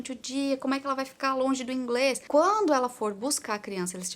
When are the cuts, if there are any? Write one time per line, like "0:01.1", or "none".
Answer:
0:02.2